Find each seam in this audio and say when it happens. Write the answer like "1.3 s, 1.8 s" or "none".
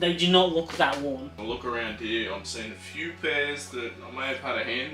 1.3 s